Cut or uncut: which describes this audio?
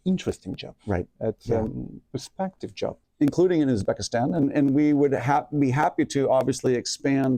cut